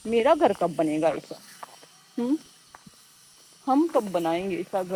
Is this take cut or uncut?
uncut